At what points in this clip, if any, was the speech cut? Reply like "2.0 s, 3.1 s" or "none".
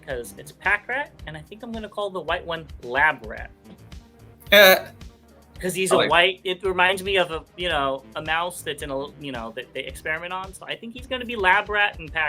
none